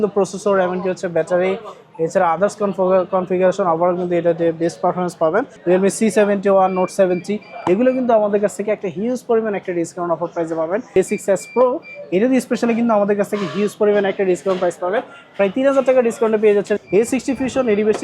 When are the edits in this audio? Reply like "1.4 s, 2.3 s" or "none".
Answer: 5.5 s, 11.0 s, 16.8 s